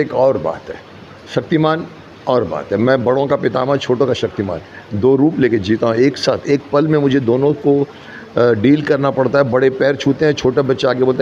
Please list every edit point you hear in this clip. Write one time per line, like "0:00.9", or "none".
none